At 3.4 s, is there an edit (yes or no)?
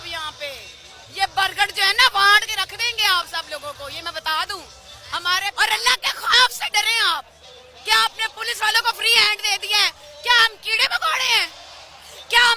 no